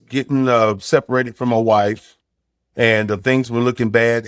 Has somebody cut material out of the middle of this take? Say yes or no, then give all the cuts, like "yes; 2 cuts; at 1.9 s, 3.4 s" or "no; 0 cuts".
no; 0 cuts